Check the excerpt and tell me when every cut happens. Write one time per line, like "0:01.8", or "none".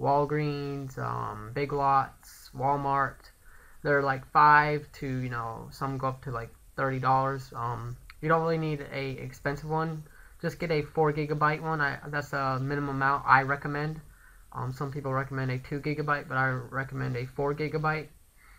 none